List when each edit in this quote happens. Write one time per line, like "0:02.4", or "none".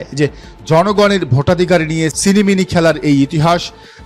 none